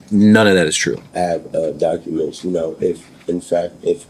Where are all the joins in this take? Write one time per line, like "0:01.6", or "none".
0:01.1